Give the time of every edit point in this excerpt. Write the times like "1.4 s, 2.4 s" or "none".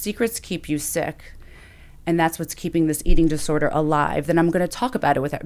none

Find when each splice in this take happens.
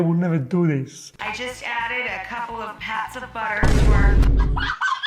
1.1 s

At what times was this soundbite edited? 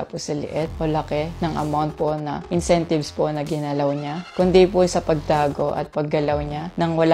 none

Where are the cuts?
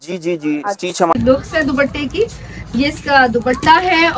1.1 s

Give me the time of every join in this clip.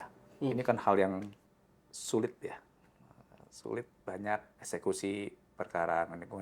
4.5 s

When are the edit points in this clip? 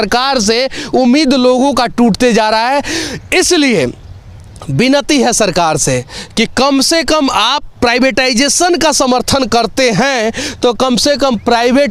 none

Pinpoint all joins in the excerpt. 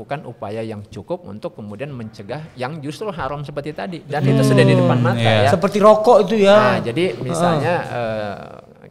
none

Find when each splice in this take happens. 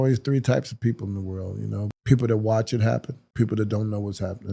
1.9 s, 3.2 s

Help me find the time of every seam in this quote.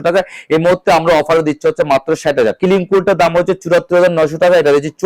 2.6 s

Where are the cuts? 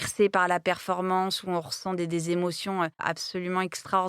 3.0 s

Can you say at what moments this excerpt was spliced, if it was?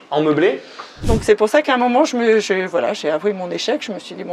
1.0 s

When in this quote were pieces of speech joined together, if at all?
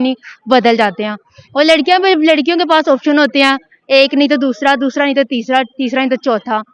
none

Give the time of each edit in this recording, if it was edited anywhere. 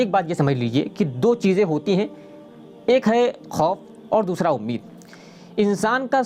none

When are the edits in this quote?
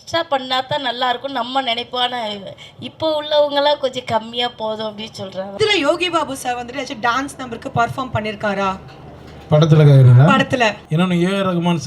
5.6 s, 10.8 s

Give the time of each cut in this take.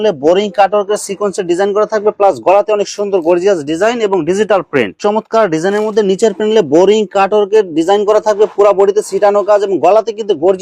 5.0 s

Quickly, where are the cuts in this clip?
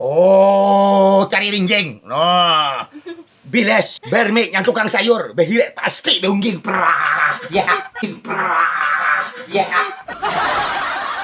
10.0 s

